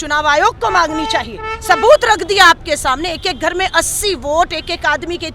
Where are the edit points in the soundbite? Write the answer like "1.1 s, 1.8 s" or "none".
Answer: none